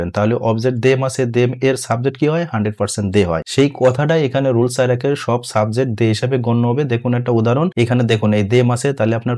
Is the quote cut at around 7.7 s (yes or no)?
yes